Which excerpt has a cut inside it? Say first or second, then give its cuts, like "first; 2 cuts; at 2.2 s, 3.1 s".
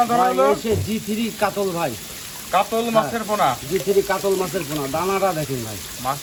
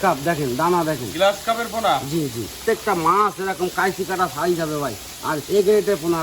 second; 1 cut; at 2.6 s